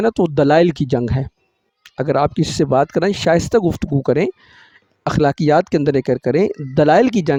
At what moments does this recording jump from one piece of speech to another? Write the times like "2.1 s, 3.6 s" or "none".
none